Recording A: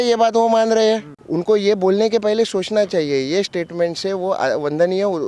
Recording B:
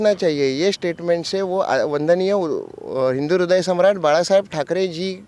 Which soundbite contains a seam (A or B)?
A